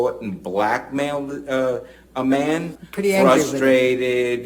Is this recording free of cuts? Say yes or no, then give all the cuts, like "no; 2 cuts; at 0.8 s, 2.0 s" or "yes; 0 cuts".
no; 1 cut; at 2.8 s